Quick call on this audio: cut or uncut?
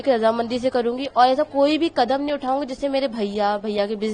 uncut